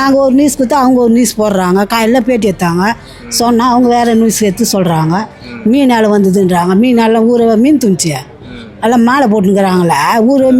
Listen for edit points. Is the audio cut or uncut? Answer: uncut